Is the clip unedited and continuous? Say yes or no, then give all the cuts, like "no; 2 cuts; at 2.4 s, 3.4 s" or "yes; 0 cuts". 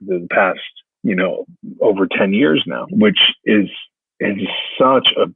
yes; 0 cuts